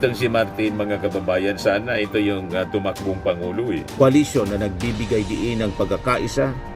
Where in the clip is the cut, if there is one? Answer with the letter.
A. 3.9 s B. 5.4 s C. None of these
A